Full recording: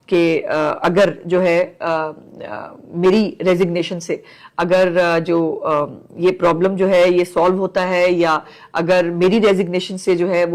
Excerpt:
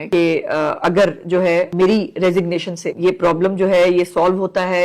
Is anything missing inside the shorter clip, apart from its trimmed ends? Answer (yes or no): yes